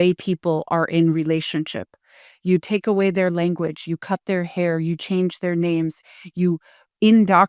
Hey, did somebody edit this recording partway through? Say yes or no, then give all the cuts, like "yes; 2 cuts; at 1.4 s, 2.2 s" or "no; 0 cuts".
no; 0 cuts